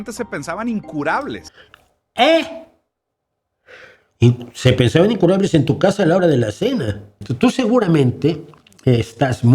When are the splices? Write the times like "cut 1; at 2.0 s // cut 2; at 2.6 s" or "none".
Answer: cut 1; at 7.2 s